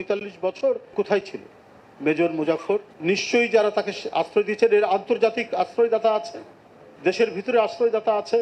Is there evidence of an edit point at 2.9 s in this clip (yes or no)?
yes